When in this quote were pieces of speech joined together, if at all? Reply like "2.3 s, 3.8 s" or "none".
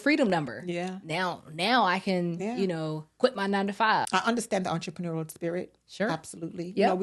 4.1 s